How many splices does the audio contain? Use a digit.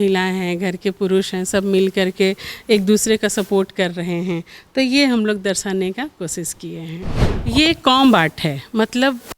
1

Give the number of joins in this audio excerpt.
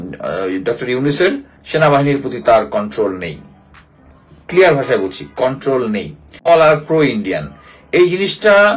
1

